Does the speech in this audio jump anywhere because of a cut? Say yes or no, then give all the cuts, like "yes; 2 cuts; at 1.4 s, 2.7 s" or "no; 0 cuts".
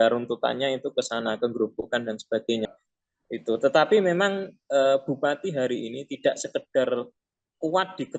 yes; 1 cut; at 2.7 s